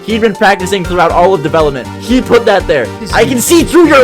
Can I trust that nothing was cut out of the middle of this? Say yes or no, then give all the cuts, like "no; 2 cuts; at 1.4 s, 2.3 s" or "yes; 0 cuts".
no; 1 cut; at 3.0 s